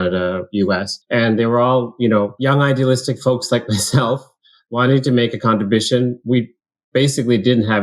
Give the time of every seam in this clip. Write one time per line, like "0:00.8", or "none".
0:00.9
0:02.3